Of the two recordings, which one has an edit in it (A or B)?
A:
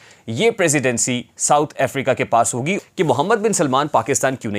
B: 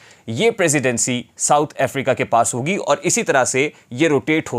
A